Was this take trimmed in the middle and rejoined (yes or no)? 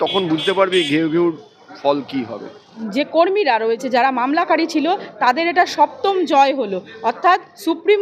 yes